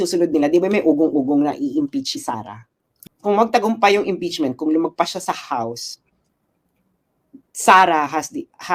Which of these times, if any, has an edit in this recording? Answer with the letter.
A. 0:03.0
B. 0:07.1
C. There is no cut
A